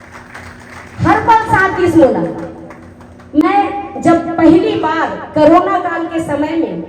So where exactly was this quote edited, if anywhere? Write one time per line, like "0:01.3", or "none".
none